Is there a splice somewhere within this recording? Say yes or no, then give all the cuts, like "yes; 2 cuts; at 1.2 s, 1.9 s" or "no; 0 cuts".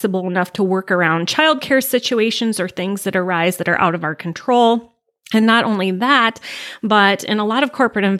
no; 0 cuts